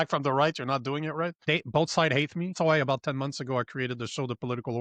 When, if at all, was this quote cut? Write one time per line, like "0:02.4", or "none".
0:01.4
0:02.5